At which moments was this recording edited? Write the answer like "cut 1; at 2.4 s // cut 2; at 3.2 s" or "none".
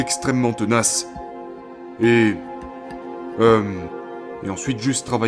none